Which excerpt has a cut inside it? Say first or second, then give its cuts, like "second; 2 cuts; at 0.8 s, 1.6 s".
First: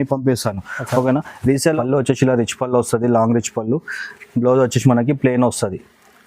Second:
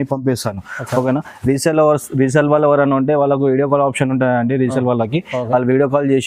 first; 1 cut; at 1.8 s